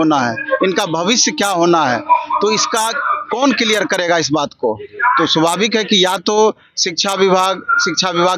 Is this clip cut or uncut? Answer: uncut